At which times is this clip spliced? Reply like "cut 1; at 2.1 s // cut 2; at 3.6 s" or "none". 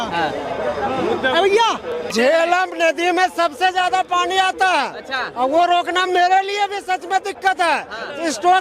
cut 1; at 2.0 s

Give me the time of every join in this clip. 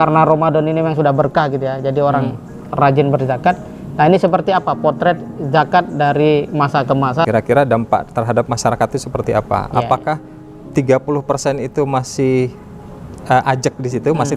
cut 1; at 7.2 s

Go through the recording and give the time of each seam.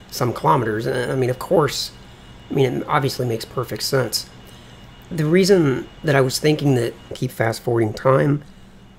none

